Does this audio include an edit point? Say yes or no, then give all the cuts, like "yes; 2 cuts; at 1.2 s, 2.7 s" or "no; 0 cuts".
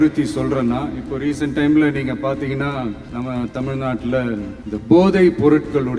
yes; 2 cuts; at 3.0 s, 4.6 s